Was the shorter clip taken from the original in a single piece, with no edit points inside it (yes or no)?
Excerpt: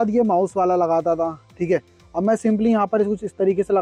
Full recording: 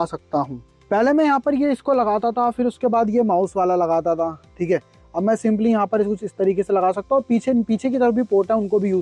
yes